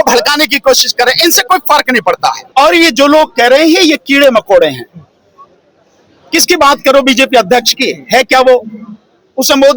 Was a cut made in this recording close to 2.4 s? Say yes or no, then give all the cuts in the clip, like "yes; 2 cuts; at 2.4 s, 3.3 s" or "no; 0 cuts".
yes; 1 cut; at 2.4 s